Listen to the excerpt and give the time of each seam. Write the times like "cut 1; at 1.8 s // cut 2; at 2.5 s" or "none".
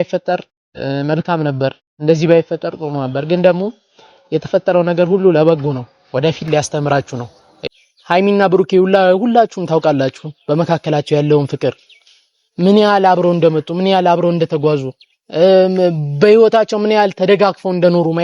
cut 1; at 7.5 s